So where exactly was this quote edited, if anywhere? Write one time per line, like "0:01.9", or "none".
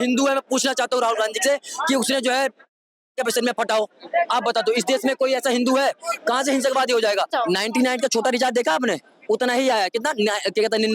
0:07.3